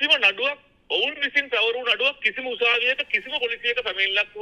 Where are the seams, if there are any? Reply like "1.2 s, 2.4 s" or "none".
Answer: none